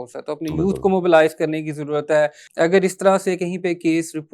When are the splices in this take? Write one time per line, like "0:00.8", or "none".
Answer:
0:02.4